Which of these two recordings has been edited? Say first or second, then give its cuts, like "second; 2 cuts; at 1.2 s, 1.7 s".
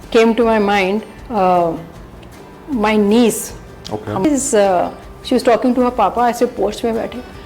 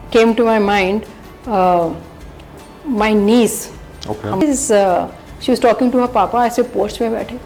first; 1 cut; at 1.2 s